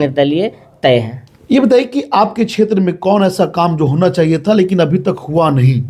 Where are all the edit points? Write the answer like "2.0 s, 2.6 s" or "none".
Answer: none